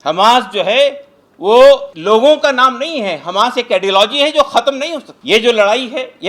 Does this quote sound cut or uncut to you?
cut